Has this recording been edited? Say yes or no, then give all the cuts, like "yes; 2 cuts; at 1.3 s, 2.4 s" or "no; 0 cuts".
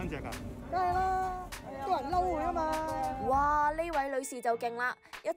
yes; 1 cut; at 3.2 s